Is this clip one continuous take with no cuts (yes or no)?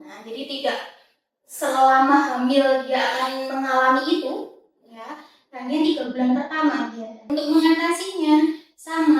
no